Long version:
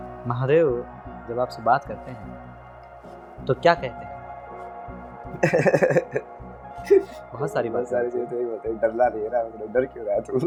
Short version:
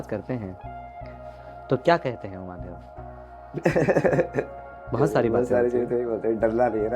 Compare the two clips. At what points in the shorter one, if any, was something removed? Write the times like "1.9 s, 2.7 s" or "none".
4.8 s